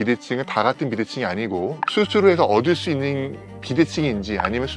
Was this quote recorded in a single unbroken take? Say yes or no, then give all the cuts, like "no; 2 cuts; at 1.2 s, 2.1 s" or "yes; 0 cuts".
no; 1 cut; at 1.8 s